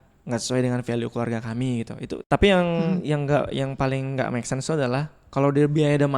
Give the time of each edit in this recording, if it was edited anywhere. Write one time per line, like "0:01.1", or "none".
0:02.3